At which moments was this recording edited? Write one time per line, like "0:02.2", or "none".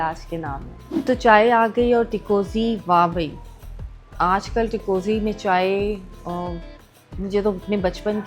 0:01.0